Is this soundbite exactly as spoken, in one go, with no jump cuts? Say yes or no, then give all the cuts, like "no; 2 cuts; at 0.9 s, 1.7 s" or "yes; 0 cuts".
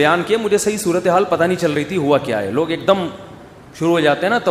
yes; 0 cuts